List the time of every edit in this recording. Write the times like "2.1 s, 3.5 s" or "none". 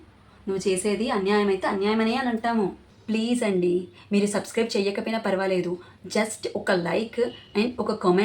2.8 s

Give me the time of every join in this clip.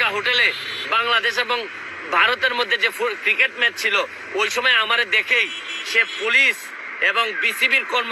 none

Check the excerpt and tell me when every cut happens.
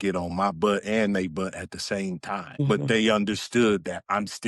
2.6 s

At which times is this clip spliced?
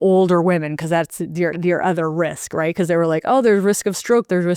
none

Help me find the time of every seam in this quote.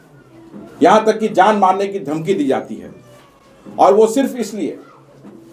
none

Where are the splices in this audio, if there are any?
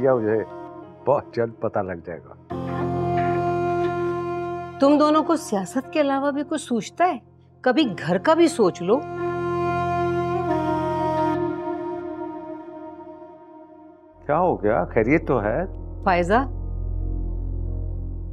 none

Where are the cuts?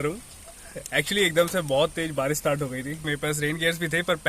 3.0 s

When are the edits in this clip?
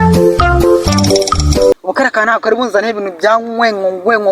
1.7 s

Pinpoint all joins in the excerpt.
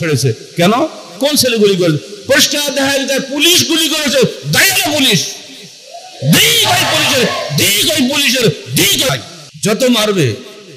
9.1 s

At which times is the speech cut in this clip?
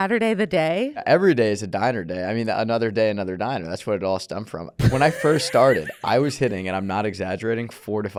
none

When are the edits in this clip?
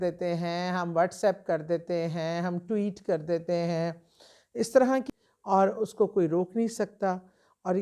5.1 s

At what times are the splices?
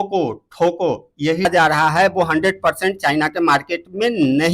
1.5 s

